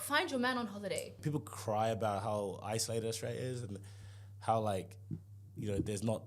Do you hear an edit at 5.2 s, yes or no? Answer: no